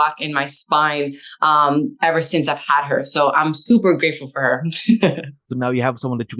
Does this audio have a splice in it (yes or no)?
no